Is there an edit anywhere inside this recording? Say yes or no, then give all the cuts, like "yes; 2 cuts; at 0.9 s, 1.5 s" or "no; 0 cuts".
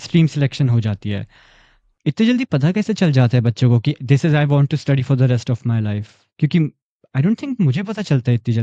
no; 0 cuts